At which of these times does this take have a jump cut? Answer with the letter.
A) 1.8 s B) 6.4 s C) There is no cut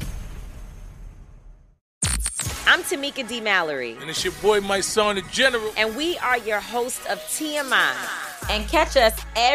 A